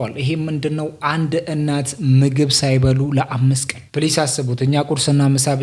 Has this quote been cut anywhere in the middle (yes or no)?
no